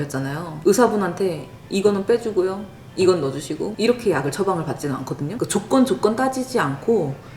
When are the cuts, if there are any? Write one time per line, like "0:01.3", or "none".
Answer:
0:05.3